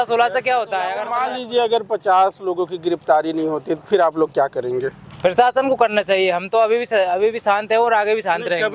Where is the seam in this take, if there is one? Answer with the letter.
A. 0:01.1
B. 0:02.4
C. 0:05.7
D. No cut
A